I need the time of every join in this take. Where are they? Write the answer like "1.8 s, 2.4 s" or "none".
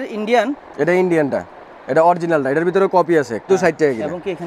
3.5 s